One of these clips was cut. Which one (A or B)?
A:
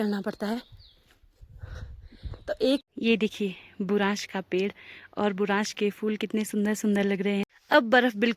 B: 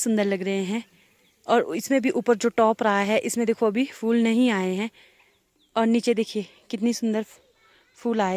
A